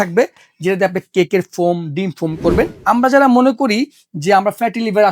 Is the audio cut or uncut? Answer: cut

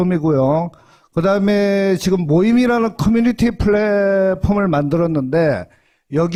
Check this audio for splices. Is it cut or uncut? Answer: uncut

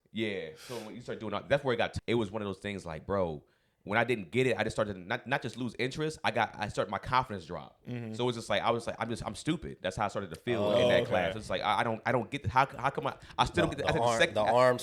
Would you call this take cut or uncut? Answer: cut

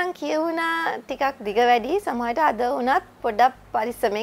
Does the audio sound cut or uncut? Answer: uncut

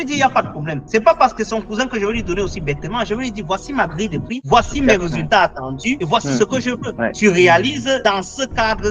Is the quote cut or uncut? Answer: uncut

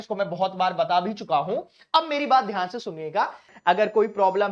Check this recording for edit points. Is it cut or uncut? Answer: cut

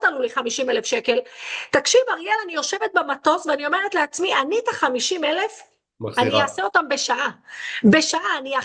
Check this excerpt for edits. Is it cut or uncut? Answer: uncut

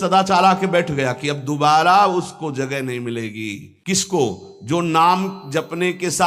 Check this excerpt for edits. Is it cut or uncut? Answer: cut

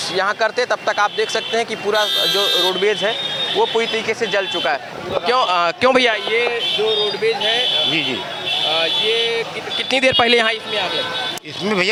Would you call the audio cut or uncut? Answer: uncut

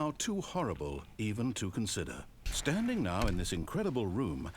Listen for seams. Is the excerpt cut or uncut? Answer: cut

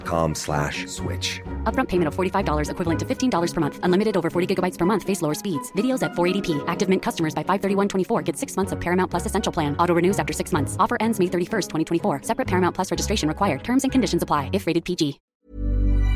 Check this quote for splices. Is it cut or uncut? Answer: cut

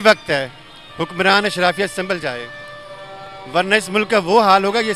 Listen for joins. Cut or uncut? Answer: uncut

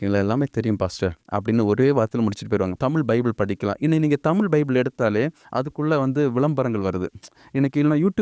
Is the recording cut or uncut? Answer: cut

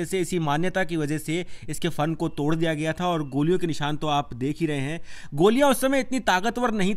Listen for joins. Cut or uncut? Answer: uncut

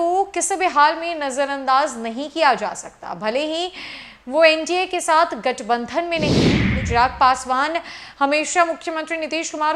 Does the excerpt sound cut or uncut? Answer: cut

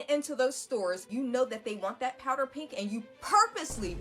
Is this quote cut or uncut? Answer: cut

